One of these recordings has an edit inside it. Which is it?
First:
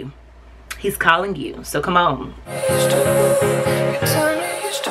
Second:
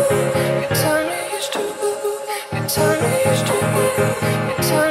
first; 1 cut; at 2.3 s

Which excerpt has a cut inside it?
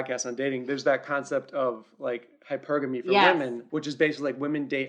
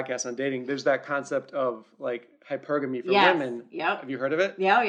first; 1 cut; at 3.6 s

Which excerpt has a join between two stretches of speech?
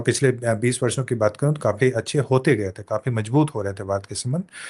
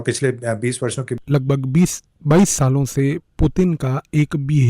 second; 1 cut; at 1.2 s

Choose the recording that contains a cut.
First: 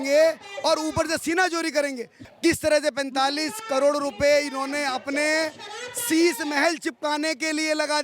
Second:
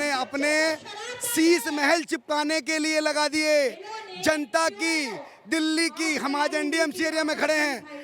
first; 1 cut; at 2.2 s

